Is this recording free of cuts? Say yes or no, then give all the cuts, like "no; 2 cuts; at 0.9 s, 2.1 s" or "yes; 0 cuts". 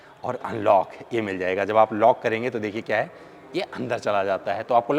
yes; 0 cuts